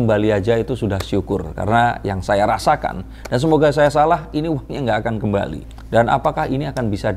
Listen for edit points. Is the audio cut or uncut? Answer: uncut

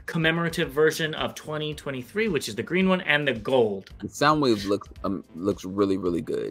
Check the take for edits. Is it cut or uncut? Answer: cut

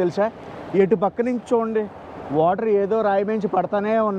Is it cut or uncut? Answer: uncut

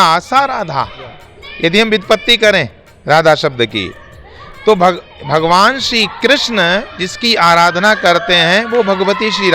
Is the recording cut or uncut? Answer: uncut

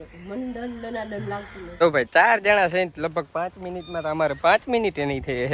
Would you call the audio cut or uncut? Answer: cut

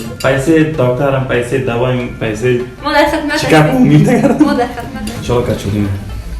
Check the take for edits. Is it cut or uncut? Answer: cut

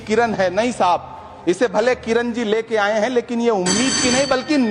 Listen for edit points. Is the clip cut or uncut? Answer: uncut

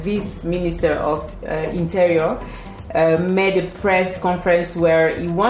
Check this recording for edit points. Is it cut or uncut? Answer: uncut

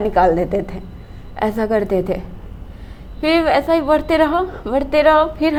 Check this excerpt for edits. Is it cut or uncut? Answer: uncut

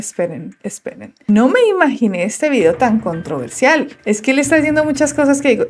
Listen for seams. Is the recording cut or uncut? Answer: uncut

